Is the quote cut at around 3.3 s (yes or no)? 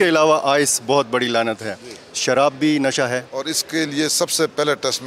yes